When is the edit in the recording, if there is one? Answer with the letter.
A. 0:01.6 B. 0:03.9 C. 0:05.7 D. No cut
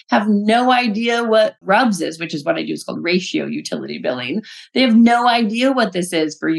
A